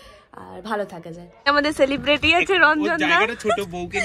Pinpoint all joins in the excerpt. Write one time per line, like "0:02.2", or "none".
0:01.5